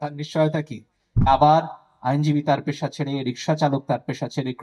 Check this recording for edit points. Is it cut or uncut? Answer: cut